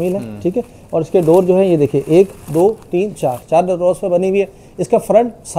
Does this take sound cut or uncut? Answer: uncut